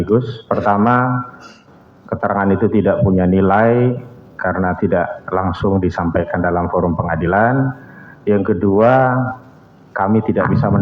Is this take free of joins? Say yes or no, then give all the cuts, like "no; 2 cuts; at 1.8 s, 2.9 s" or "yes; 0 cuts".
yes; 0 cuts